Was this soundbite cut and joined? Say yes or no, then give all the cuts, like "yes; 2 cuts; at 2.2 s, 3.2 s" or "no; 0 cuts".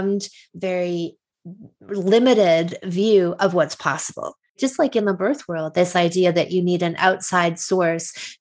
yes; 1 cut; at 4.6 s